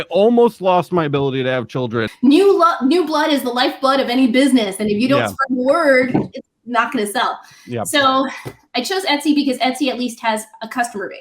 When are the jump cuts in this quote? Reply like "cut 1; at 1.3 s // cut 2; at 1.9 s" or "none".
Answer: cut 1; at 2.1 s